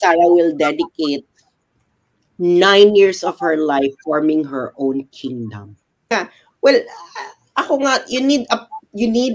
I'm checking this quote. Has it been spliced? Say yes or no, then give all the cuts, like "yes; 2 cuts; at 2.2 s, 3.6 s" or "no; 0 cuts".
yes; 1 cut; at 6.1 s